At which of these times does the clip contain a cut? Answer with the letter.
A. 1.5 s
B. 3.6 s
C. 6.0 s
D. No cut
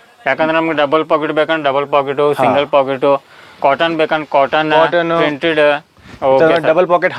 D